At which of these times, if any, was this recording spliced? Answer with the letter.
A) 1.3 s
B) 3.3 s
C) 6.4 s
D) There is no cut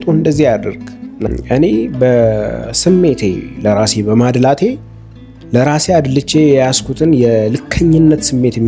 A